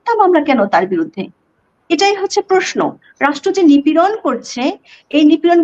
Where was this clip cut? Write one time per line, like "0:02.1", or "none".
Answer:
none